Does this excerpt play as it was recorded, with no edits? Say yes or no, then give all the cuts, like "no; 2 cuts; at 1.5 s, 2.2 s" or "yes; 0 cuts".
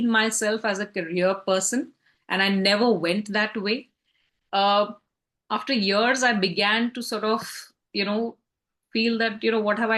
yes; 0 cuts